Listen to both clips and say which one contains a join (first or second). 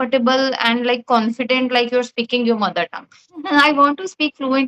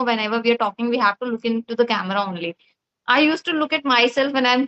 first